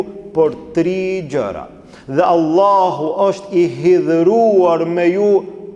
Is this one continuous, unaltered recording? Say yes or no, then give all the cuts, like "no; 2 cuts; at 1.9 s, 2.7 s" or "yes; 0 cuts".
yes; 0 cuts